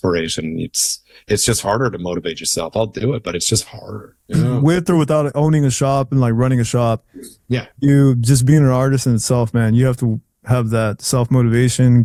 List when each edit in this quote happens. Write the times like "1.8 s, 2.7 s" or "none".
none